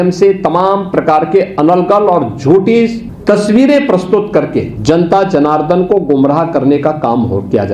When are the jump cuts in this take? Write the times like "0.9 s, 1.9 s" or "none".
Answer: 3.1 s, 4.7 s